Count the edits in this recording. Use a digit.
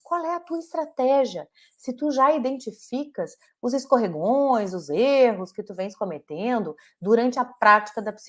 0